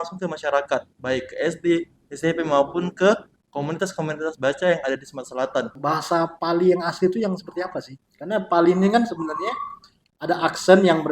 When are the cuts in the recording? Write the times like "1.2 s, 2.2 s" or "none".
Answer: 5.7 s